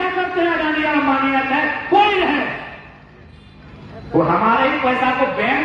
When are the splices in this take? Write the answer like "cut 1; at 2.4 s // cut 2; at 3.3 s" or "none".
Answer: none